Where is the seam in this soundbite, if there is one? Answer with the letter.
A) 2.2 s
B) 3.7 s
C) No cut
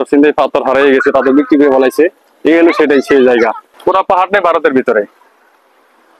B